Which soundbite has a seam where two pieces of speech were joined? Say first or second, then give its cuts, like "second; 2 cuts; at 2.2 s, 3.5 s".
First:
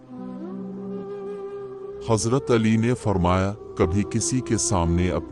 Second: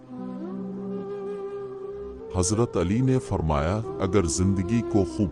second; 1 cut; at 2.0 s